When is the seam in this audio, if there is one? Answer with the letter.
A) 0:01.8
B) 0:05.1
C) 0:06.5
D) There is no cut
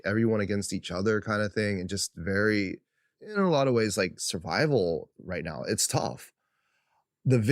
C